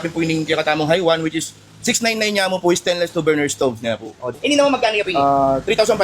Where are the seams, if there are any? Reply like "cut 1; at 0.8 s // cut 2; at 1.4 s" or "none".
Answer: cut 1; at 4.3 s